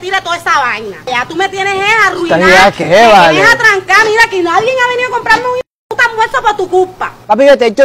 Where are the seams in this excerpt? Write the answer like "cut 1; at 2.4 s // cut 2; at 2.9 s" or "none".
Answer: none